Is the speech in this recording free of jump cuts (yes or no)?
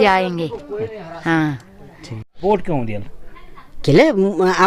no